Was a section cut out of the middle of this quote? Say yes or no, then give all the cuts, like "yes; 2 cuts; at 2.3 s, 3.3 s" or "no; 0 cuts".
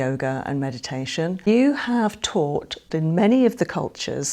yes; 2 cuts; at 1.5 s, 2.8 s